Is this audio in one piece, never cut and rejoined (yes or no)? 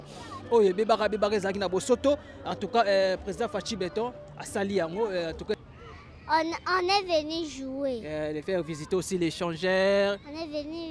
no